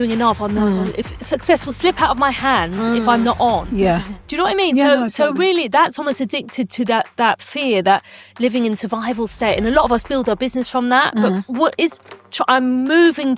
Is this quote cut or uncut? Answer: uncut